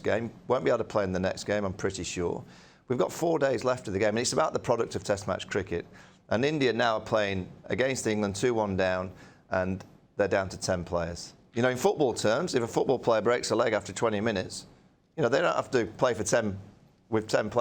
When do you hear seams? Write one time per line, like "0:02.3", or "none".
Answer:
none